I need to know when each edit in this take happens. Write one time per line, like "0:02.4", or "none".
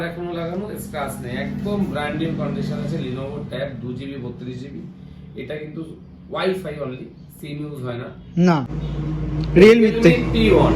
0:08.8